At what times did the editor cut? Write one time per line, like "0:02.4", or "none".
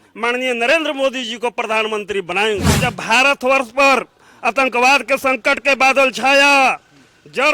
0:02.7